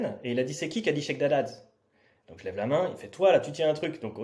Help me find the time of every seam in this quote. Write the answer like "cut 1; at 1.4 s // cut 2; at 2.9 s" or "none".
none